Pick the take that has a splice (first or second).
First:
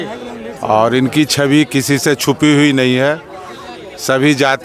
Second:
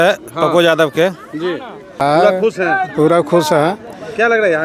second